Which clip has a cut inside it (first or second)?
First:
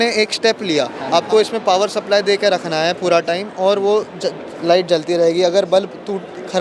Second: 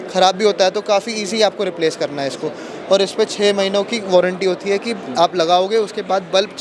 first